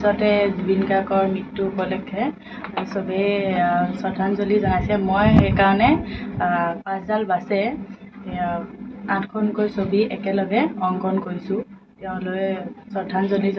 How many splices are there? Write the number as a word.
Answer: zero